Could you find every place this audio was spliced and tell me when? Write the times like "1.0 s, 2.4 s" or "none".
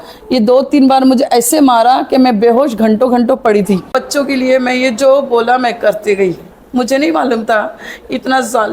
3.9 s

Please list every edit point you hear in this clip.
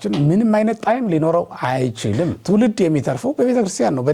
2.4 s

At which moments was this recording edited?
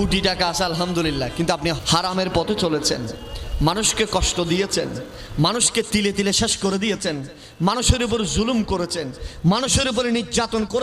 1.8 s

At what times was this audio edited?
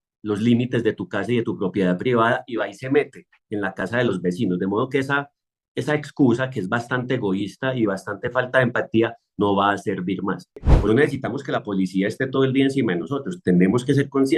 10.7 s

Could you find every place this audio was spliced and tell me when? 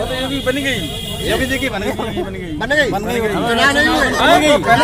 none

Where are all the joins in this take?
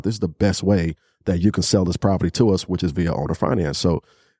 none

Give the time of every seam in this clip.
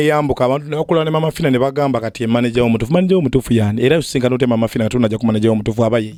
none

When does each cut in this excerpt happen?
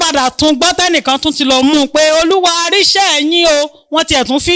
none

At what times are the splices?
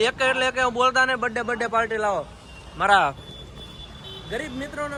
none

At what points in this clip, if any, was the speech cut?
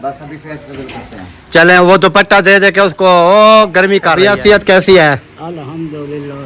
4.2 s

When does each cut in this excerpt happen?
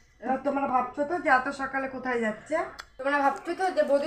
2.8 s

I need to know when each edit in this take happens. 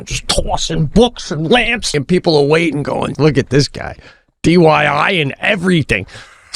1.9 s, 3.1 s

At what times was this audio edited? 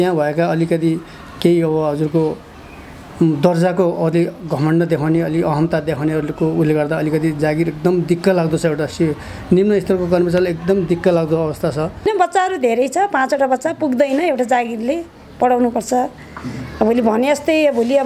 12.0 s

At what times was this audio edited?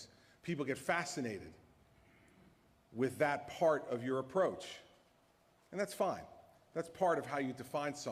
5.7 s

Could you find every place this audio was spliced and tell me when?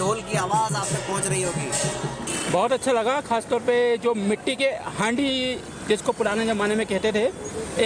2.2 s

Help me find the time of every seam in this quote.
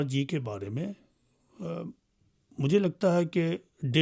none

